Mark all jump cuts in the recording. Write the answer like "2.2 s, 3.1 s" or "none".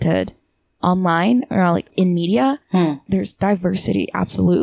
3.0 s